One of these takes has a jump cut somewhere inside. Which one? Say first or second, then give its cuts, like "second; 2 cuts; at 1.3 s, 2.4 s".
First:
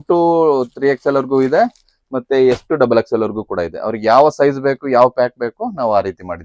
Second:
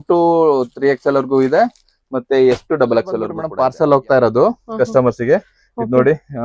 second; 1 cut; at 3.4 s